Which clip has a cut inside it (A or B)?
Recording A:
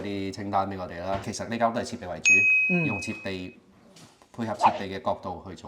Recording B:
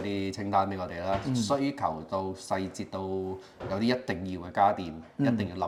A